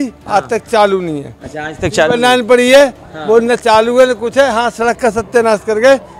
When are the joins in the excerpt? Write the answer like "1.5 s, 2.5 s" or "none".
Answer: none